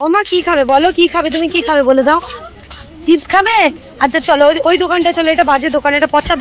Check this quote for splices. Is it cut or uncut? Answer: uncut